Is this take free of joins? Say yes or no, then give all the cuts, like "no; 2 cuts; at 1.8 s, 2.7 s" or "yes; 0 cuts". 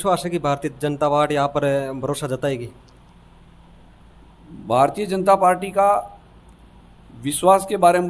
yes; 0 cuts